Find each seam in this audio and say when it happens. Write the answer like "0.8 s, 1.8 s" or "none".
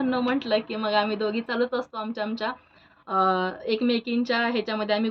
none